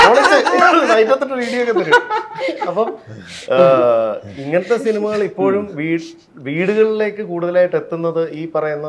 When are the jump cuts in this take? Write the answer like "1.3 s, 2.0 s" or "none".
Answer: none